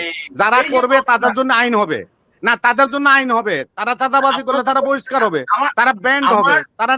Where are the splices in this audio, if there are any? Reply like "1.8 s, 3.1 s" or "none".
none